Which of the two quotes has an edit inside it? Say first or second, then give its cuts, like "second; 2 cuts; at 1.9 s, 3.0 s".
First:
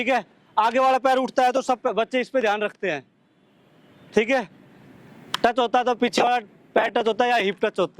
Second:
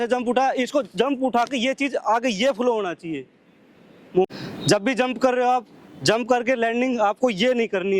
second; 1 cut; at 4.3 s